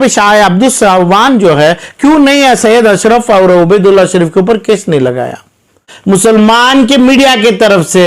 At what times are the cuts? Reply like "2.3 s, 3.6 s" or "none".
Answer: 5.9 s